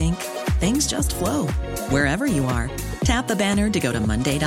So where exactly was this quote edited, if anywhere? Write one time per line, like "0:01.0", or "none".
none